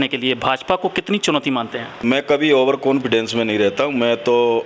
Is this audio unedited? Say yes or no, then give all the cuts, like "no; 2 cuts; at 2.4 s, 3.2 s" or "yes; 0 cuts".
no; 1 cut; at 2.0 s